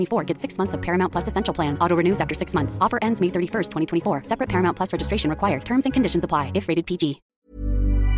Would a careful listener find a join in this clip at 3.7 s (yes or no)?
no